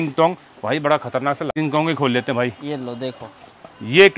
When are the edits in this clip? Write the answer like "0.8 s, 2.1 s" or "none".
1.5 s